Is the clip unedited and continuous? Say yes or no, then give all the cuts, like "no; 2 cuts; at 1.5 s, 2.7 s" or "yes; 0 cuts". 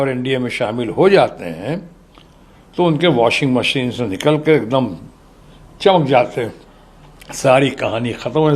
yes; 0 cuts